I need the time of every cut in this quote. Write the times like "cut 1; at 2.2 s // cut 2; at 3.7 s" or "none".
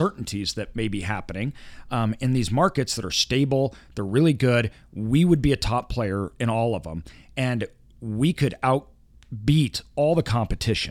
none